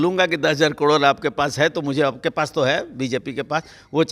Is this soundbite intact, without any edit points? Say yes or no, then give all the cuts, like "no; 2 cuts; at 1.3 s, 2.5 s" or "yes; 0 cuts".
yes; 0 cuts